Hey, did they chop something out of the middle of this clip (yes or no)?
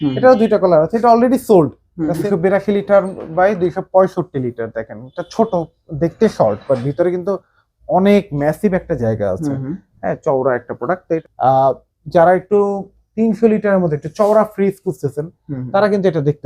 yes